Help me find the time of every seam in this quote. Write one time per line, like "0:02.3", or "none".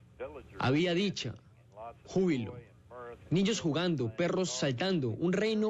none